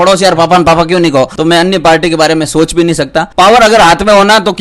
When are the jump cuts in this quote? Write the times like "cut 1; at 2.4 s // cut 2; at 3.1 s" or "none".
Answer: cut 1; at 1.3 s // cut 2; at 3.3 s